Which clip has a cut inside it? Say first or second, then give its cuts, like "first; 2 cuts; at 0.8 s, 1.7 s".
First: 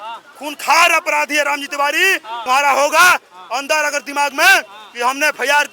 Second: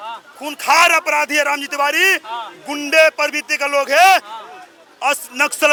first; 1 cut; at 2.3 s